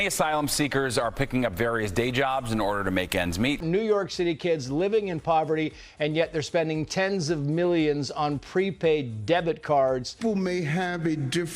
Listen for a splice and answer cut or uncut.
cut